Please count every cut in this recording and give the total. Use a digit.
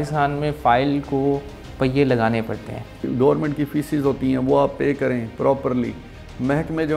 1